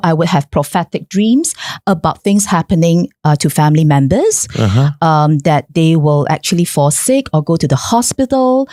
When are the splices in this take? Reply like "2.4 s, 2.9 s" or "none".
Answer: none